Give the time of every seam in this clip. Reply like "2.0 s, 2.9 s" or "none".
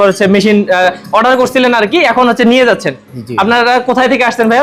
none

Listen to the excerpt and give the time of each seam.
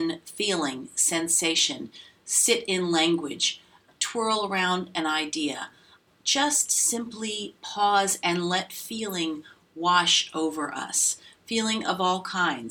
3.9 s, 6.0 s

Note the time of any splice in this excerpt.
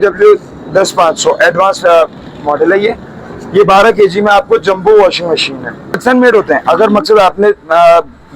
6.0 s

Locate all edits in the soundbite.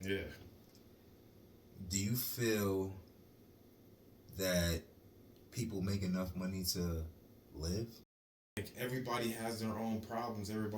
8.1 s

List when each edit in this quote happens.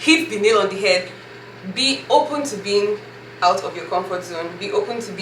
none

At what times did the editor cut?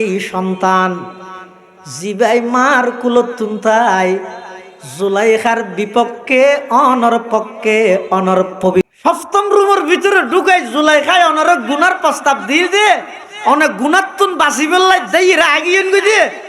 8.8 s

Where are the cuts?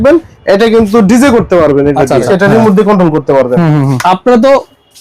2.3 s, 4.0 s

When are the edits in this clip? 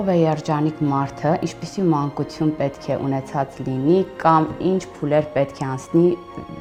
none

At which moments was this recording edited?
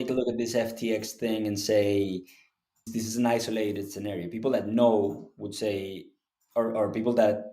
2.9 s

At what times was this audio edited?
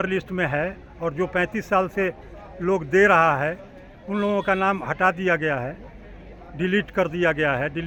none

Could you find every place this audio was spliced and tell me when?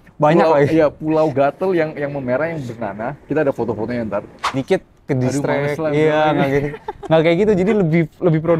4.5 s

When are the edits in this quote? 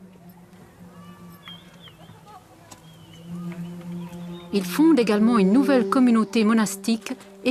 none

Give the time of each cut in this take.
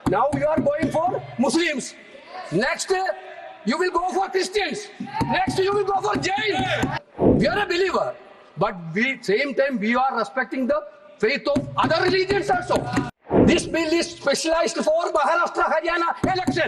6.9 s, 13.2 s

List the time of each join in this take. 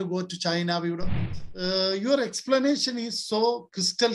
1.2 s

